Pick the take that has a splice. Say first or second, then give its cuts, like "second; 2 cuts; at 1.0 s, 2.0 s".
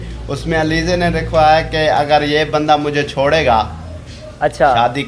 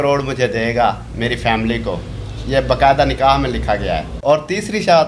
second; 1 cut; at 4.1 s